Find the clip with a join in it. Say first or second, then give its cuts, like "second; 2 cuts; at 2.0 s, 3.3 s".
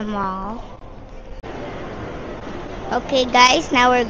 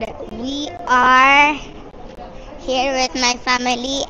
first; 1 cut; at 1.4 s